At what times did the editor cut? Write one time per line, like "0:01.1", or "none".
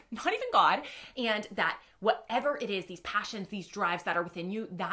none